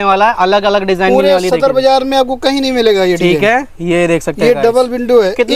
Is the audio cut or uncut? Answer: uncut